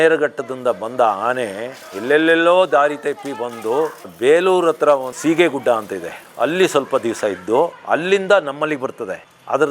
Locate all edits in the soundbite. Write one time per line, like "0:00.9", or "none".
none